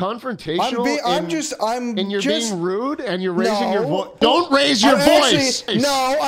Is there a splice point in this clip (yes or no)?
no